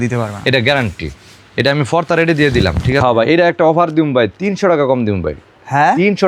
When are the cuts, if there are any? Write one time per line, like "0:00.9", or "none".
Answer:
0:03.0

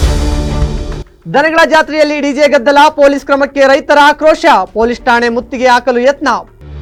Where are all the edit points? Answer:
none

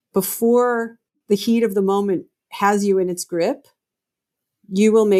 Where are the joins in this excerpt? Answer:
none

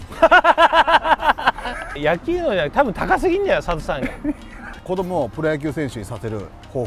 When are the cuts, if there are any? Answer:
0:02.0
0:04.7

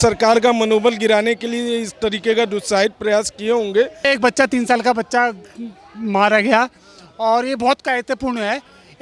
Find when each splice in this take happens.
0:04.0

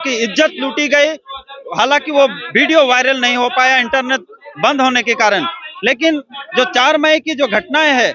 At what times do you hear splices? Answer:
none

